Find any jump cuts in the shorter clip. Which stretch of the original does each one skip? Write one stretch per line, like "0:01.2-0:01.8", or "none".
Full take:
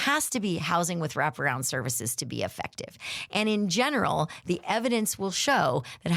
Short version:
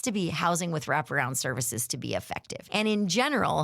0:02.8-0:03.2